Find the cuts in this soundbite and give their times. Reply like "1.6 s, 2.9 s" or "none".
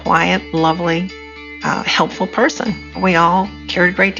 3.0 s